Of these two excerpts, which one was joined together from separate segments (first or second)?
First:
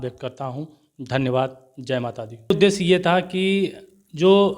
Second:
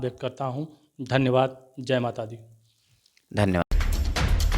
first